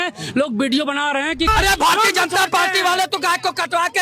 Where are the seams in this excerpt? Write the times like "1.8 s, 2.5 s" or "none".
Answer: 1.5 s